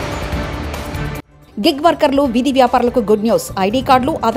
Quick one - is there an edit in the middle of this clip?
no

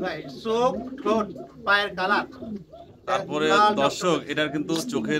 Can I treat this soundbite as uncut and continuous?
yes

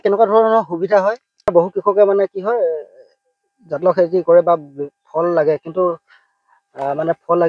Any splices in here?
yes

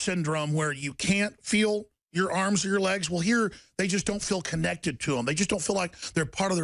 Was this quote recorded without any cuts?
yes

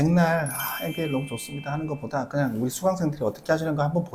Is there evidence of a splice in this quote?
no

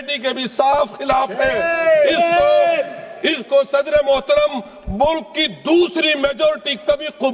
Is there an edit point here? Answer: no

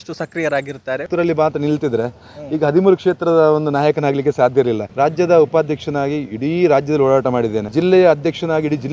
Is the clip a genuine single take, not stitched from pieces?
no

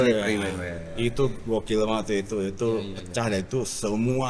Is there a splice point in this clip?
no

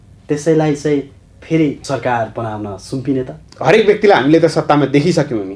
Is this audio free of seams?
no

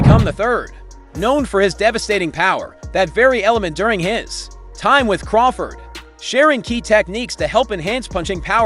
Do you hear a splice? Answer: yes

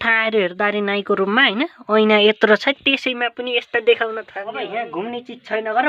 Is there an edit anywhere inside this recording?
yes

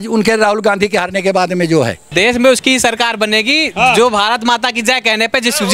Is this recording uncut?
no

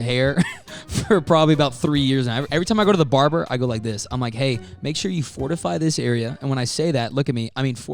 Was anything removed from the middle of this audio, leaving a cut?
yes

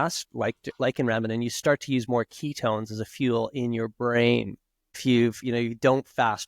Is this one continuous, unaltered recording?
no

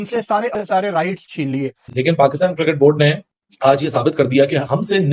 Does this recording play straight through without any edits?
no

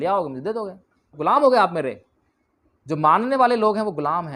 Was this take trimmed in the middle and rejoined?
yes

